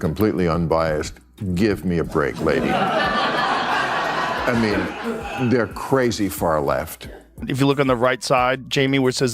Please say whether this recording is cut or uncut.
cut